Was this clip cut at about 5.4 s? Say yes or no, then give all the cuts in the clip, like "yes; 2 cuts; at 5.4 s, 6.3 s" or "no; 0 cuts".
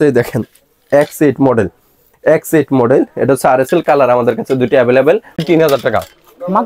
yes; 1 cut; at 5.4 s